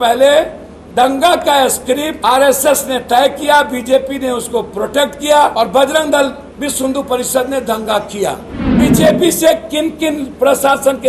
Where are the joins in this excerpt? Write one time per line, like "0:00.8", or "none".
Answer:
0:02.1
0:05.5
0:06.5
0:08.6